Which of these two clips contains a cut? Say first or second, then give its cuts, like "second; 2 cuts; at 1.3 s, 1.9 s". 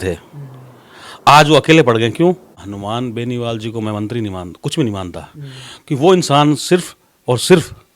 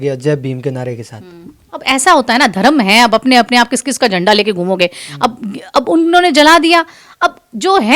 first; 1 cut; at 2.1 s